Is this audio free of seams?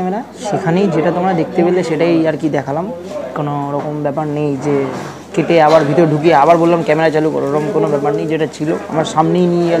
yes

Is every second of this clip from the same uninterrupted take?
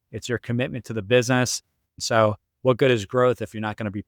no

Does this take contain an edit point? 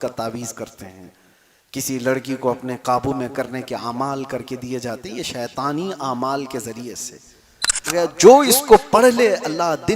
yes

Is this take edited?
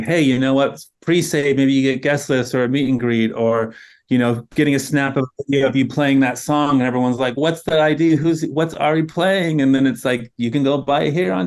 no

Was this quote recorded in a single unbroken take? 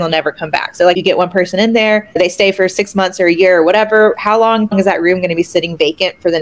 no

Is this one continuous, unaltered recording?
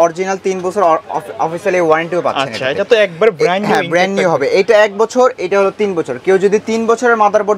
yes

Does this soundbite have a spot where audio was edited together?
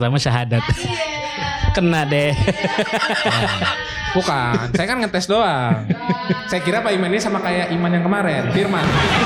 no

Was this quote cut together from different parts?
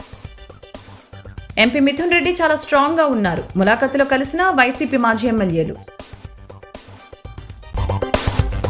yes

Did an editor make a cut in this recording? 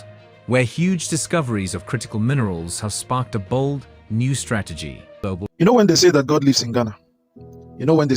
yes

